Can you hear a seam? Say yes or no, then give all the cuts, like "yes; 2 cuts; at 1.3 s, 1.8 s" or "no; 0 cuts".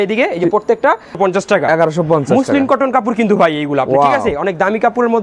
yes; 1 cut; at 1.1 s